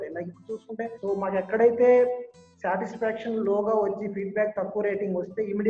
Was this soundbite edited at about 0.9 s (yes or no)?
yes